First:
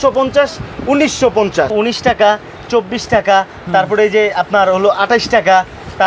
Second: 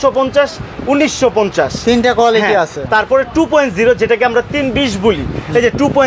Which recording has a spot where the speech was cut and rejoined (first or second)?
first